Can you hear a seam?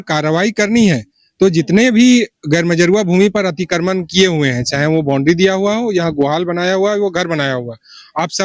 no; 0 cuts

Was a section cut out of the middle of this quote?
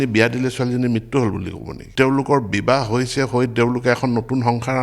yes; 1 cut; at 1.8 s

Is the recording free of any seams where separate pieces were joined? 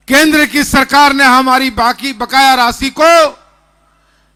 yes; 0 cuts

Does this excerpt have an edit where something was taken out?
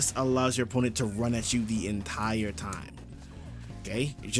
no; 0 cuts

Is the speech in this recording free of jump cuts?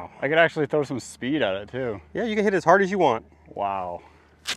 yes; 0 cuts

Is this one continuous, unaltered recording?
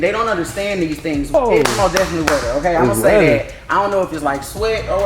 no; 1 cut; at 1.3 s

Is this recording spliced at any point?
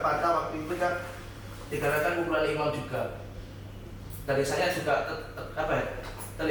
no; 0 cuts

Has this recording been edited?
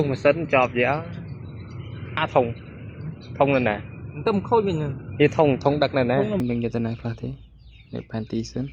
yes; 1 cut; at 6.4 s

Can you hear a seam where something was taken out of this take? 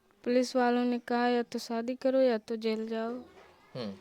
no; 0 cuts

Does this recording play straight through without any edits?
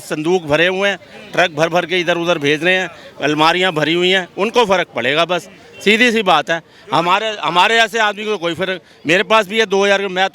yes; 0 cuts

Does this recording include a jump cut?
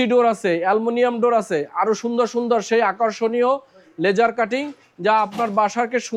no; 0 cuts

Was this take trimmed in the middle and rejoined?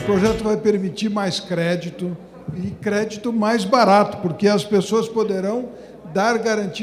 no; 0 cuts

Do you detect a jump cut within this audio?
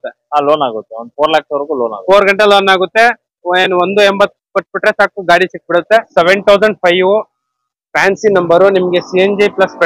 yes; 1 cut; at 6.1 s

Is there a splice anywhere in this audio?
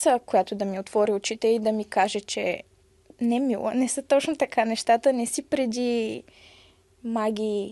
no; 0 cuts

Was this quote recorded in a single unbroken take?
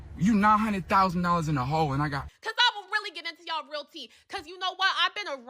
no; 1 cut; at 2.2 s

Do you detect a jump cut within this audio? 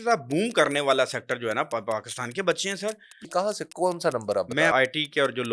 yes; 2 cuts; at 3.2 s, 4.7 s

